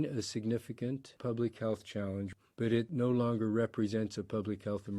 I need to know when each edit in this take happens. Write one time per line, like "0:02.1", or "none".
0:01.2
0:02.6